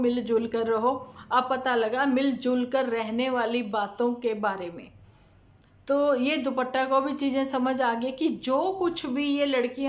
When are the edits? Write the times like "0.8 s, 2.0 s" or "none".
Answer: none